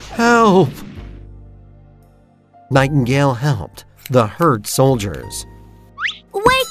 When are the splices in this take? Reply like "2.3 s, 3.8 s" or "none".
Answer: 1.0 s, 2.7 s